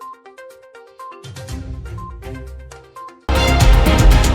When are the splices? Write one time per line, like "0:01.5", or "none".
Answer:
0:03.1